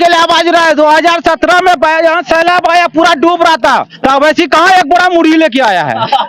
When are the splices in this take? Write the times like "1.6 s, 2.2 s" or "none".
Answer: none